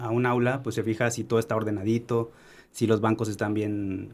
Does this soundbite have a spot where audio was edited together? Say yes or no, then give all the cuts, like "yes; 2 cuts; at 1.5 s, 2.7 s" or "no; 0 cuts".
no; 0 cuts